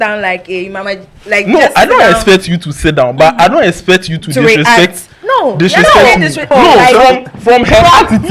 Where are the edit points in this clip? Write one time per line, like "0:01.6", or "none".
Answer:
0:06.5